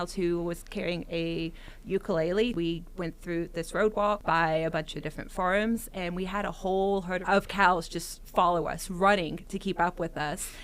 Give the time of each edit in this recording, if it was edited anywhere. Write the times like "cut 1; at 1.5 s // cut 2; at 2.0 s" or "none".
cut 1; at 2.5 s // cut 2; at 4.2 s // cut 3; at 7.2 s